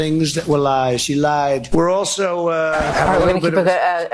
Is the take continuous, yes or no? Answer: no